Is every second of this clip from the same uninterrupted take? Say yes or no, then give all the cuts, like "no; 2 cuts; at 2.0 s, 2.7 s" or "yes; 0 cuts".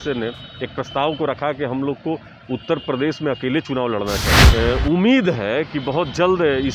no; 1 cut; at 4.3 s